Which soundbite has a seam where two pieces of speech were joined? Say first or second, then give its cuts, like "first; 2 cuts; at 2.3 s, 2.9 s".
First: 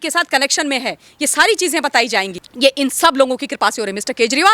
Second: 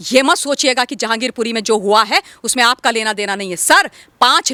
first; 1 cut; at 2.4 s